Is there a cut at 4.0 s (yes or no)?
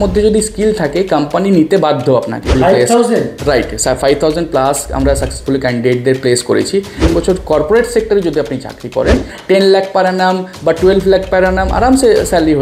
no